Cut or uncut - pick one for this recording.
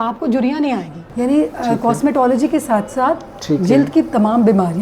cut